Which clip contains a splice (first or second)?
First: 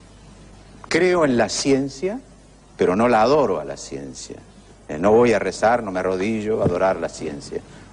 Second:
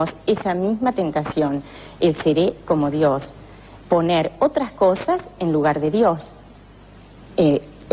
second